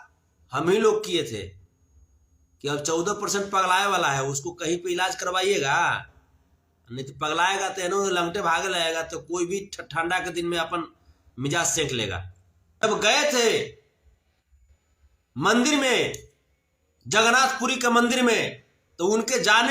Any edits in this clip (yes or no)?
yes